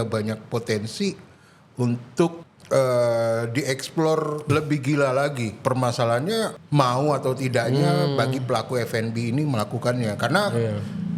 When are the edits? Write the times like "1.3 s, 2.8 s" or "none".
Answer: 2.5 s, 4.5 s, 5.5 s, 6.6 s